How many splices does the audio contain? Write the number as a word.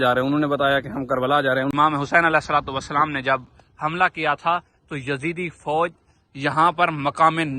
one